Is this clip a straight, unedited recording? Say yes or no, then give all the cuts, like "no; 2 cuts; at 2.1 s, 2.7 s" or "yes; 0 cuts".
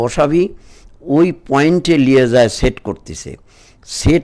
yes; 0 cuts